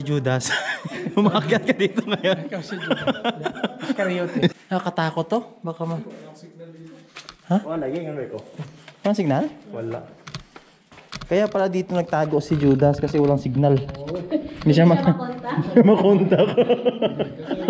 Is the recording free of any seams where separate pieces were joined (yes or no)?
no